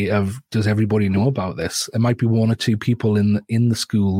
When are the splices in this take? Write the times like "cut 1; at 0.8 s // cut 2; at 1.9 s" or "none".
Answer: none